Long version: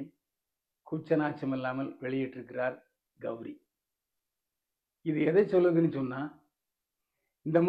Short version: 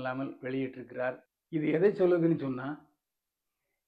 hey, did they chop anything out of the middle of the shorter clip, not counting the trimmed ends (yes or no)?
yes